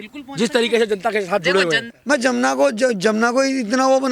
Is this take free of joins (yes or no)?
no